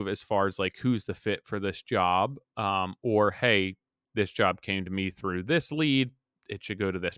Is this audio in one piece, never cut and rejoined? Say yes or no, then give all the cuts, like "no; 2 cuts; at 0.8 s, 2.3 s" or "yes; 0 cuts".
yes; 0 cuts